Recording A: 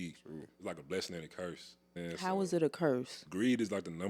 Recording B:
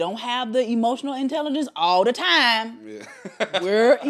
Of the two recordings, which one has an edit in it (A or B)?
A